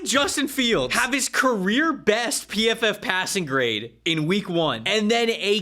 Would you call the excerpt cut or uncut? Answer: cut